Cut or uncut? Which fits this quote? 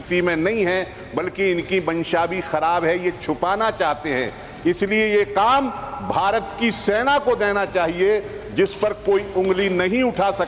uncut